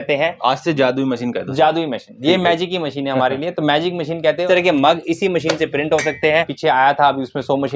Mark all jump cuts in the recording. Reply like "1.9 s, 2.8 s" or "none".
4.4 s, 6.5 s